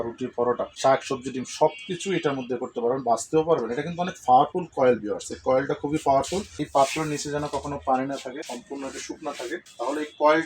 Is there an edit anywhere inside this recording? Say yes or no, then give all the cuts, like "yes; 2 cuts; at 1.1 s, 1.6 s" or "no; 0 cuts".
yes; 2 cuts; at 6.5 s, 8.5 s